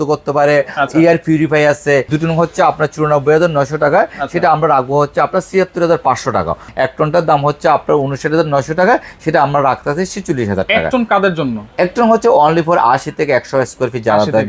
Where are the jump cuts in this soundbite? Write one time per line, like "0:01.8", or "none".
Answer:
0:02.1
0:06.6